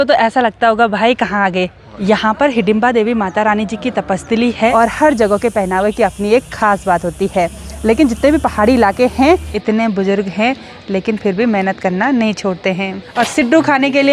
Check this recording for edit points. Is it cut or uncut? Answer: cut